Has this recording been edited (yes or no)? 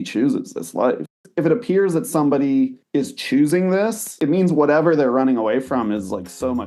yes